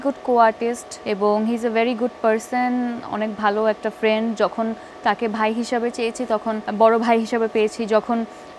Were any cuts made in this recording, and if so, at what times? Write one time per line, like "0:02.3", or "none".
0:00.9
0:06.7